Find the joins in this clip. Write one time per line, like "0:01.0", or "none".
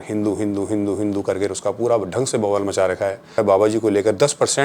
0:03.4